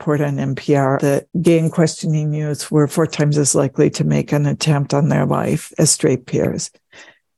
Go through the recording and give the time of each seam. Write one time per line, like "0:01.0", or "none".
0:01.0
0:05.7